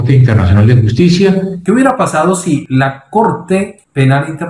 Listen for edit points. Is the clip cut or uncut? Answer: cut